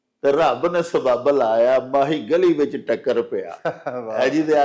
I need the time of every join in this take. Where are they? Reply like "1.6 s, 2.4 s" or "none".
none